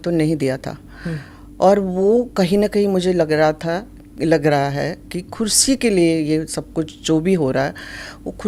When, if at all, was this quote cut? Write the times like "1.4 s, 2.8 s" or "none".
none